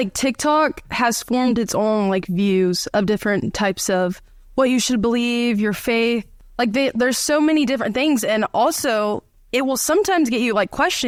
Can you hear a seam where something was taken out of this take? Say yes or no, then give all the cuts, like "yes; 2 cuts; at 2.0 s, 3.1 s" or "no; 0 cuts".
no; 0 cuts